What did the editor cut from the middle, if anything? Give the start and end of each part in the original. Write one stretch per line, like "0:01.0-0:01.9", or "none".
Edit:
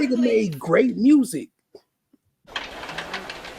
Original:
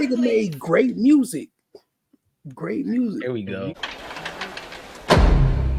0:02.5-0:03.8